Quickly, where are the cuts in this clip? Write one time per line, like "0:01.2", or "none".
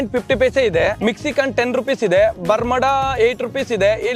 0:01.0